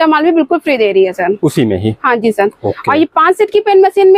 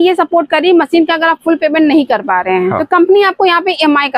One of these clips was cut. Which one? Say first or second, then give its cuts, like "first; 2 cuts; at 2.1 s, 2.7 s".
second; 1 cut; at 2.8 s